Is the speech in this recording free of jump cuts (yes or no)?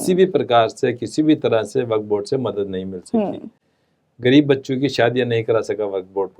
yes